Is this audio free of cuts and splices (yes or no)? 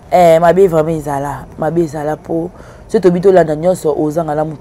yes